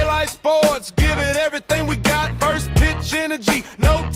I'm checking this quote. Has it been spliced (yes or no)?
no